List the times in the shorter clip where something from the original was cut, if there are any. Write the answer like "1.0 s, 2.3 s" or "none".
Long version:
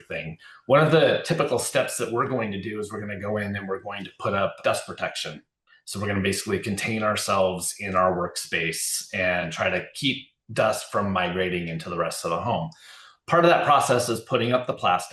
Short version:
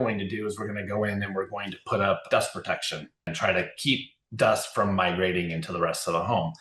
3.3 s